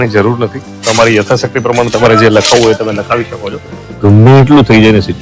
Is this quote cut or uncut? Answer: cut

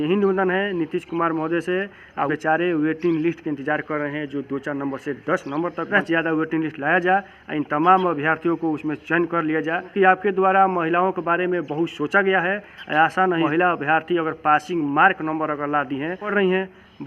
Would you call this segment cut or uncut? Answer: cut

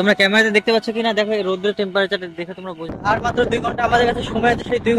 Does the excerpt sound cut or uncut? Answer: cut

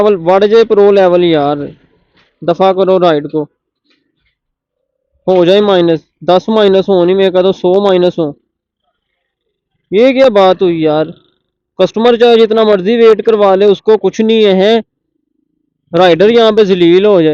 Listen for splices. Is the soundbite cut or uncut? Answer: uncut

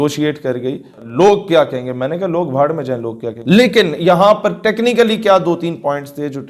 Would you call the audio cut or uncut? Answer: cut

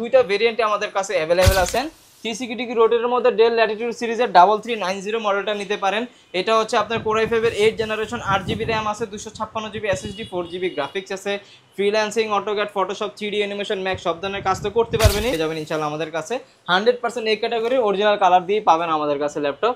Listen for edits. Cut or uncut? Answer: cut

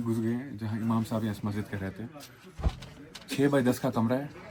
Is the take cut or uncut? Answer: uncut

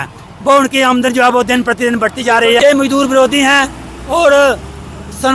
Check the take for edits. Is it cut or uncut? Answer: cut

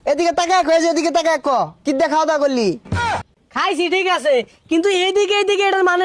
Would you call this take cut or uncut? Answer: uncut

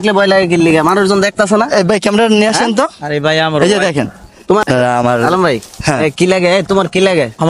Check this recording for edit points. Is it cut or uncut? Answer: cut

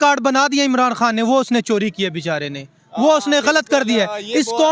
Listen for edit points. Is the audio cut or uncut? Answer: uncut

